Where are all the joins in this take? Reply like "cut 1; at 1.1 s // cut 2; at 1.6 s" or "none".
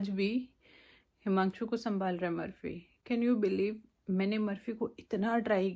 none